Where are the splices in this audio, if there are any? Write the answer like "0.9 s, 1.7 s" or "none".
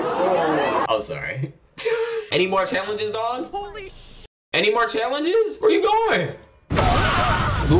2.3 s